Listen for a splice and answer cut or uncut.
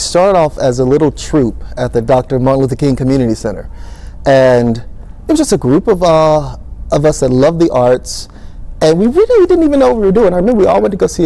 uncut